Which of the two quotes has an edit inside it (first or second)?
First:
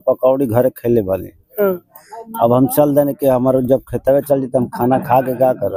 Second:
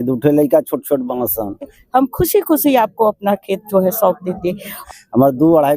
second